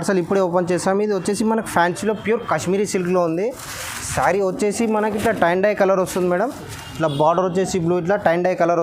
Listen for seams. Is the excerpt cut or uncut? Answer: uncut